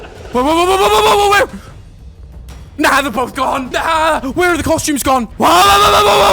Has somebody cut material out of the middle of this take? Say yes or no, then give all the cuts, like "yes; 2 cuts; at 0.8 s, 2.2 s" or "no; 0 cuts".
yes; 2 cuts; at 3.7 s, 5.3 s